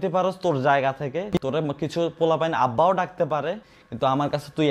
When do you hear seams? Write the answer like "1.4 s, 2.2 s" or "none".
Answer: none